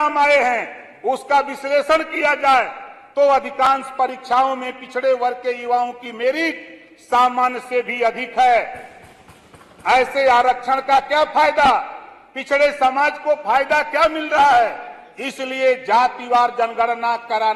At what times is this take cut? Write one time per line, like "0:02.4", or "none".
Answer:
none